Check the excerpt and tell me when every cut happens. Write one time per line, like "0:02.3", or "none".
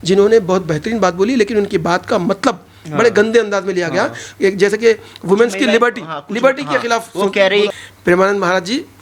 0:07.7